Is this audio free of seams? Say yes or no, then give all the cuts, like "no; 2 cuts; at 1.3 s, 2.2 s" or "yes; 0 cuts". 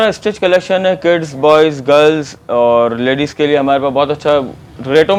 yes; 0 cuts